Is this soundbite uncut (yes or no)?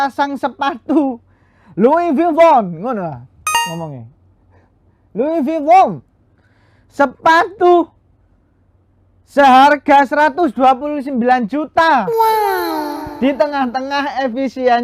yes